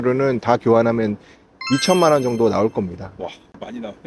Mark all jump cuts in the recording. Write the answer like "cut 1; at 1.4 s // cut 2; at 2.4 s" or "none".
none